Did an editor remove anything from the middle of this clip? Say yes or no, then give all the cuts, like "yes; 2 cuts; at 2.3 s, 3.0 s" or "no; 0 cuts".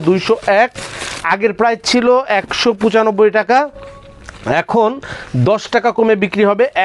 no; 0 cuts